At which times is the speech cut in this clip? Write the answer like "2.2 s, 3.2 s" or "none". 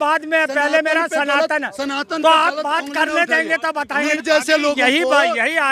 4.2 s